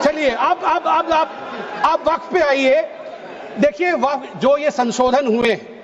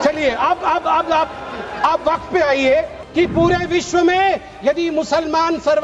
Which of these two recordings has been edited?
second; 1 cut; at 3.0 s

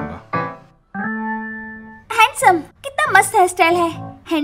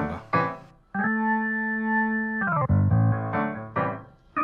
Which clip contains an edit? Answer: first; 1 cut; at 1.7 s

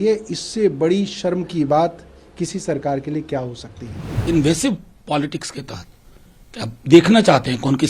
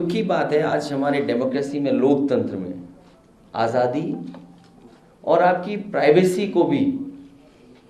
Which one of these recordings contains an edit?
first; 1 cut; at 4.2 s

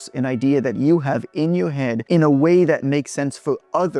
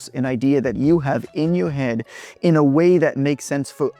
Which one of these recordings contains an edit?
first; 1 cut; at 2.0 s

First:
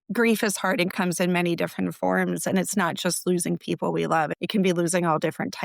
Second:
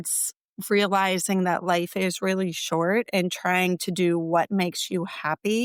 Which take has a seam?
first; 2 cuts; at 0.9 s, 4.3 s

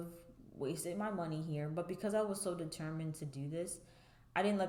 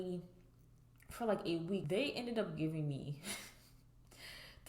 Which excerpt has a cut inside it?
second; 1 cut; at 1.8 s

